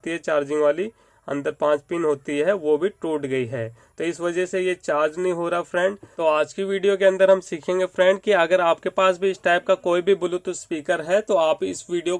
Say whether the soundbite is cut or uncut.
uncut